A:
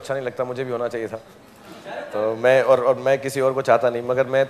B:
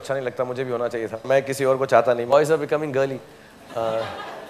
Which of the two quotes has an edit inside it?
B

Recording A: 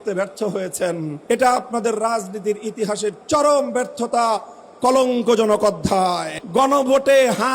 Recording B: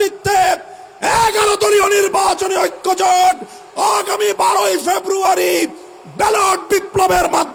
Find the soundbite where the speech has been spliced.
A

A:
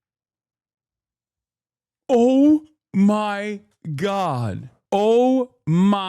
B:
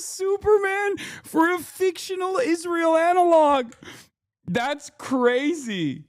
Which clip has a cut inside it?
A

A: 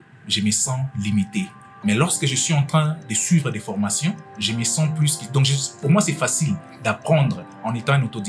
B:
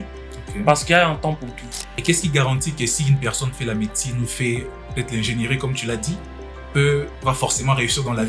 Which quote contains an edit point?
B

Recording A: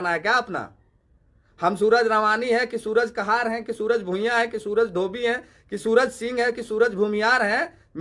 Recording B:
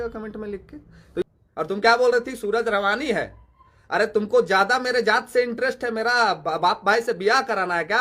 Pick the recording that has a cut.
B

